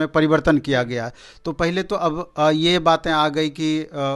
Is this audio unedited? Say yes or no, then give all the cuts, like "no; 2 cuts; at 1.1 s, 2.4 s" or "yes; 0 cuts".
yes; 0 cuts